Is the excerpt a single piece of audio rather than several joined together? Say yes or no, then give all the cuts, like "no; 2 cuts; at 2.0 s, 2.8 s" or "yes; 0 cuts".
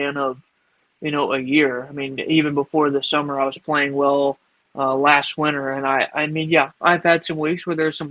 yes; 0 cuts